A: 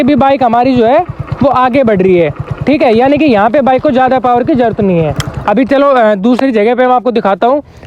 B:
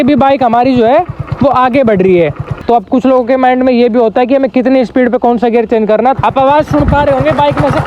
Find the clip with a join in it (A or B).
B